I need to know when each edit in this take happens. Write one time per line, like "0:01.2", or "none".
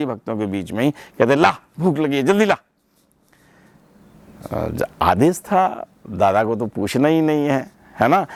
none